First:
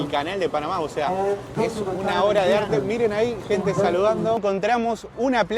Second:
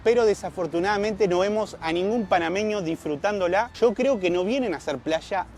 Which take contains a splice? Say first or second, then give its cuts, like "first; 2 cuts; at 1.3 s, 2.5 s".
first; 1 cut; at 4.4 s